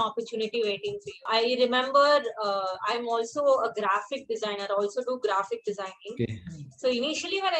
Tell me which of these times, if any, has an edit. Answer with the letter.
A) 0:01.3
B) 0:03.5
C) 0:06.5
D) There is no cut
A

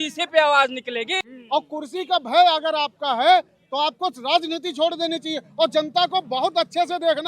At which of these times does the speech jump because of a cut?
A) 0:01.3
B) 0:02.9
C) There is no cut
A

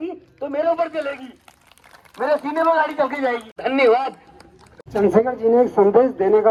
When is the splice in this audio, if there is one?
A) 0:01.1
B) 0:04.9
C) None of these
C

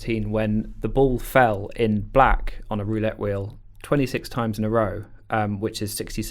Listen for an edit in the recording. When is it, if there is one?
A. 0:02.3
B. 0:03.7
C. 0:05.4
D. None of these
D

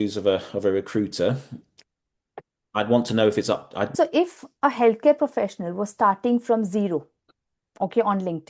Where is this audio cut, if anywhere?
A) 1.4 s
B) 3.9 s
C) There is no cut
B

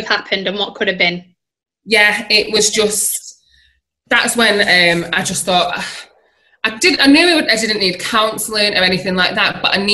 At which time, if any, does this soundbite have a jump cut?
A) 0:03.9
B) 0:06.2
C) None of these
A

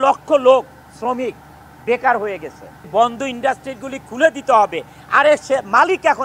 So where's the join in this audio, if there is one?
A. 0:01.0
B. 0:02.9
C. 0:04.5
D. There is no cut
B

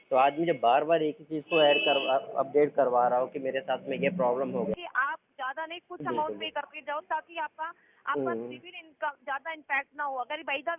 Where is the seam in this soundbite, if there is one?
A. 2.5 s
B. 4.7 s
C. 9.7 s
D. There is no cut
B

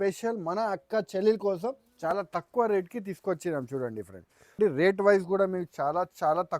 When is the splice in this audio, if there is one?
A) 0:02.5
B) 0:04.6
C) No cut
B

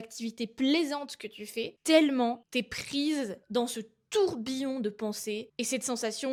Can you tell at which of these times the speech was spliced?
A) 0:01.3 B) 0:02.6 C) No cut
C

